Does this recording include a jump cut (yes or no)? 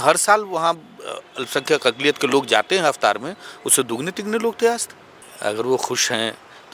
yes